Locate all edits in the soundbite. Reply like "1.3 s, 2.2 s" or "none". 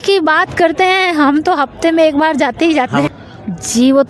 3.1 s